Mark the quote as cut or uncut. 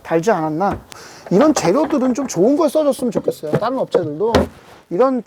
cut